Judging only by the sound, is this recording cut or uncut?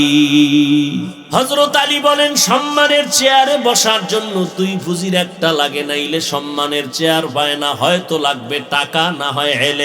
cut